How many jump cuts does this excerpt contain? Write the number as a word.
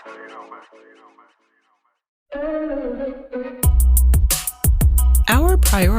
one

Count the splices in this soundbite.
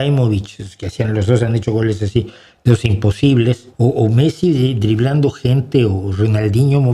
one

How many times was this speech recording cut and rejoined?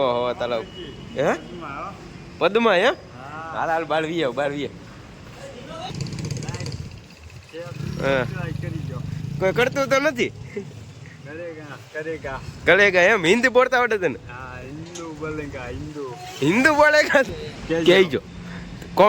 two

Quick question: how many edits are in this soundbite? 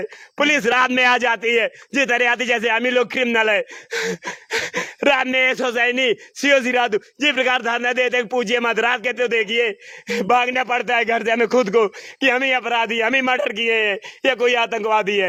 zero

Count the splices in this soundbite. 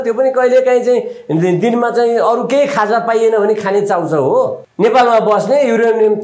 one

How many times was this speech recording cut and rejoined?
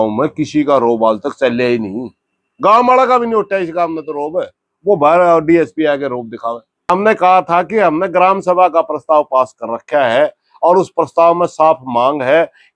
one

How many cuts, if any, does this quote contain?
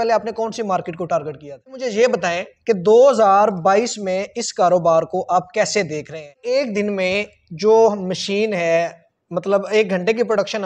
two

